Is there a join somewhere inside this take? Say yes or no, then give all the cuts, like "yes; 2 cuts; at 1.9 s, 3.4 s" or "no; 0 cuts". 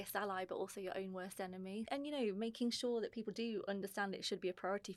yes; 1 cut; at 1.9 s